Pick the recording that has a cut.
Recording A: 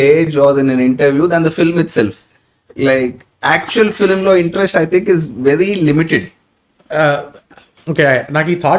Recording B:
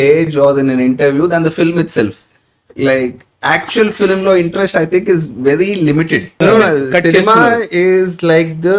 B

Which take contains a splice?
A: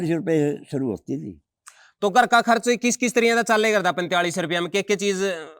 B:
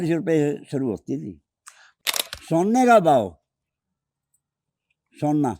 B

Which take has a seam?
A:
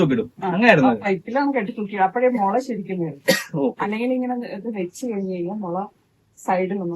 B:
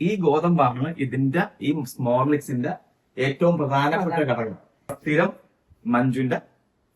B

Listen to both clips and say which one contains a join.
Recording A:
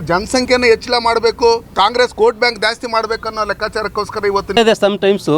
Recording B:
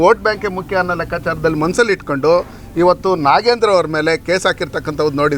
A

